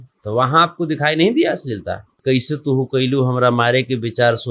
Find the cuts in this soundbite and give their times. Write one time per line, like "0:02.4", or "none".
0:02.1

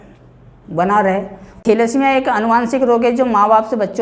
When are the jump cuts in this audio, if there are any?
0:01.6

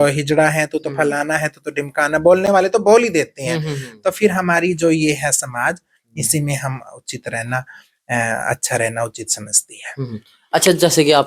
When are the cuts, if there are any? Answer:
none

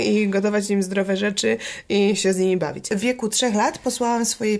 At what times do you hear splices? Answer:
0:02.9

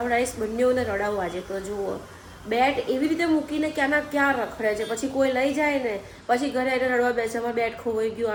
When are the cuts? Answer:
none

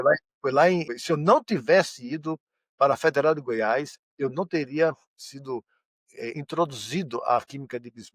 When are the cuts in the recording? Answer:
0:00.9

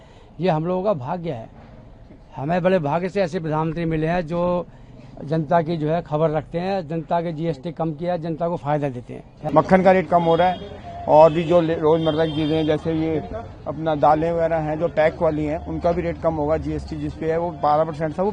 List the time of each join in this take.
0:09.3

